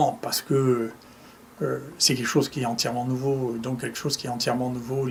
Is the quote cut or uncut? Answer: uncut